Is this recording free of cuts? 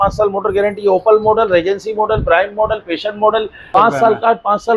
no; 1 cut; at 3.7 s

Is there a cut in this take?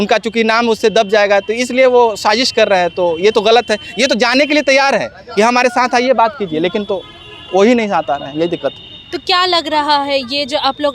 no; 0 cuts

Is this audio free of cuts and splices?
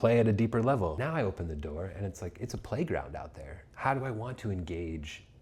no; 1 cut; at 1.0 s

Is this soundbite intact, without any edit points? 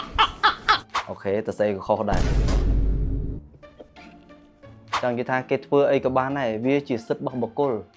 yes; 0 cuts

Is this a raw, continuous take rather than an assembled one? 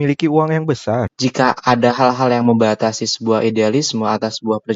no; 1 cut; at 1.0 s

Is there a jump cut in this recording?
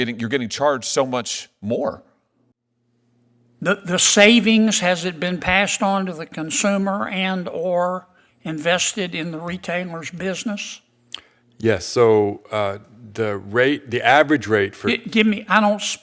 yes; 1 cut; at 2.6 s

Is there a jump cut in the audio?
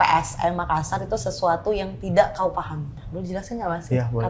yes; 1 cut; at 3.0 s

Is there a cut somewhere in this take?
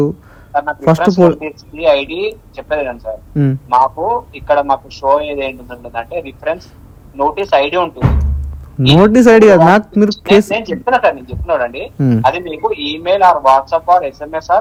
no; 0 cuts

